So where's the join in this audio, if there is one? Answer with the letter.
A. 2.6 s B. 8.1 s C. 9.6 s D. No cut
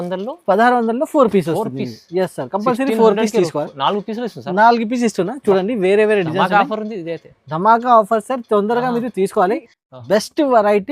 C